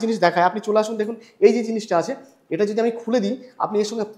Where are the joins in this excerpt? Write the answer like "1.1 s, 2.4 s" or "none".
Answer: none